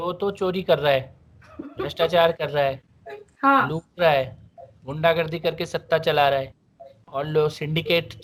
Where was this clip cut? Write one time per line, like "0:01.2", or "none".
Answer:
none